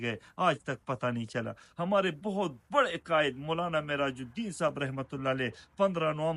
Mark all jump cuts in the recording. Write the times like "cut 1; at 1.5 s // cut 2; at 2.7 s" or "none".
none

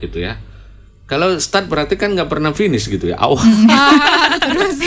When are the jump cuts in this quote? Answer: none

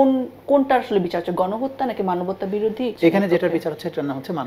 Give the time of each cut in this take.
cut 1; at 2.9 s

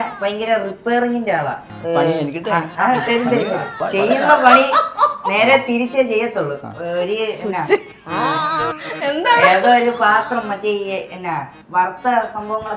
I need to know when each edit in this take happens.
cut 1; at 1.6 s // cut 2; at 3.8 s

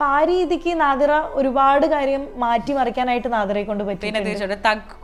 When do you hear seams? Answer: none

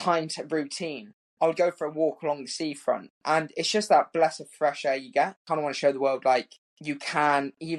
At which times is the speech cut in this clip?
cut 1; at 5.5 s

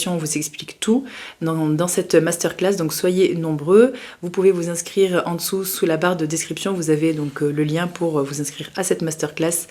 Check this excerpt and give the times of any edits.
none

